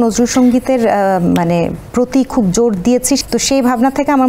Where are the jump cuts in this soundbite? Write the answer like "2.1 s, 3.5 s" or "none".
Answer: 3.2 s